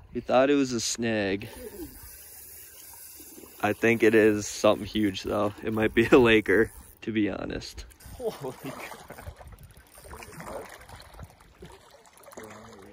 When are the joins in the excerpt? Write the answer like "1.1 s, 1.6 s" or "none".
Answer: none